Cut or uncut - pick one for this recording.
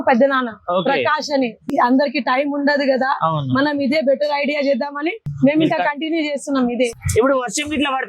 cut